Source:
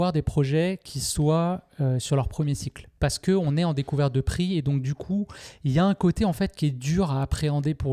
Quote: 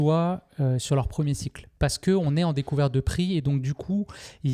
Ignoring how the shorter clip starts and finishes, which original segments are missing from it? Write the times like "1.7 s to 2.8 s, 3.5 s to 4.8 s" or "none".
none